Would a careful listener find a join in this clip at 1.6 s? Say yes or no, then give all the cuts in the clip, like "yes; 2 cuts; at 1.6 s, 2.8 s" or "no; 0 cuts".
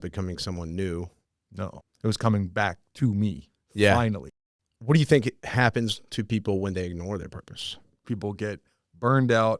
yes; 4 cuts; at 1.6 s, 4.3 s, 5.4 s, 8.0 s